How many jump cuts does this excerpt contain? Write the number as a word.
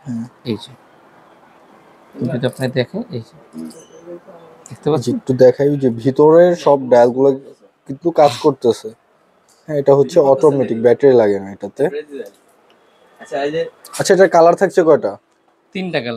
zero